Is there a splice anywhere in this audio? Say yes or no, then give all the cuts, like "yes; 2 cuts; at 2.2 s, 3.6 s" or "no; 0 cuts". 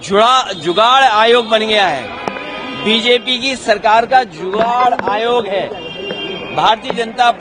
no; 0 cuts